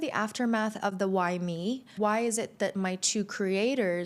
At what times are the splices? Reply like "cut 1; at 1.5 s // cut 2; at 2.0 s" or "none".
cut 1; at 1.9 s

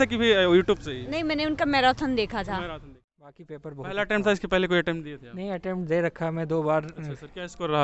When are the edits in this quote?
cut 1; at 3.4 s

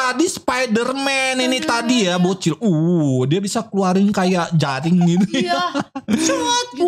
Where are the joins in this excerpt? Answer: none

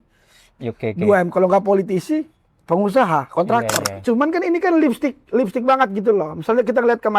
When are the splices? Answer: cut 1; at 3.9 s

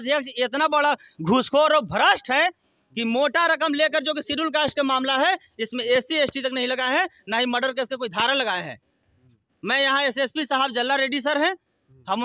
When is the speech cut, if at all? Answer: none

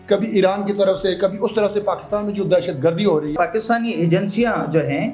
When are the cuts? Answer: cut 1; at 3.3 s

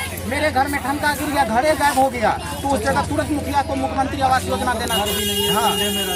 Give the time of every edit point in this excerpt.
none

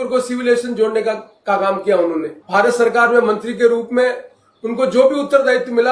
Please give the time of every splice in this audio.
cut 1; at 2.4 s

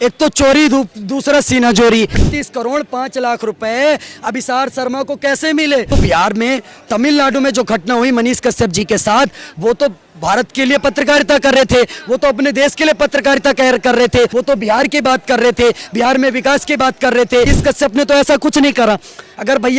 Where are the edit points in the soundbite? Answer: cut 1; at 2.2 s // cut 2; at 5.9 s // cut 3; at 14.3 s // cut 4; at 17.5 s

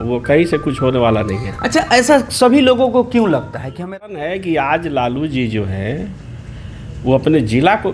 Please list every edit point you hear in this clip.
cut 1; at 3.9 s

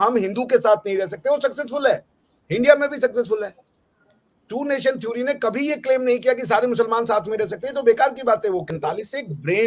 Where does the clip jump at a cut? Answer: cut 1; at 8.6 s

